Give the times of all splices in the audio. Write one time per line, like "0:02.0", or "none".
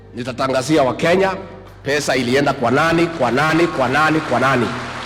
none